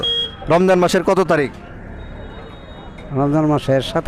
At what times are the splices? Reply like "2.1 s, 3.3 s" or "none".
none